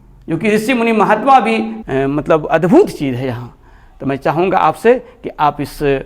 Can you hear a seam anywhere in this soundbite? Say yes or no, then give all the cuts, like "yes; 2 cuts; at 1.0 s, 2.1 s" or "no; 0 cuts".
yes; 1 cut; at 1.7 s